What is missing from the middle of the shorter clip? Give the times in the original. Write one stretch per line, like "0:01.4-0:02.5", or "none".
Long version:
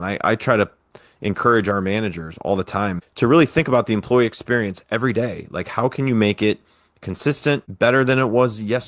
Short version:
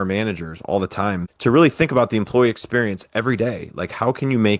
none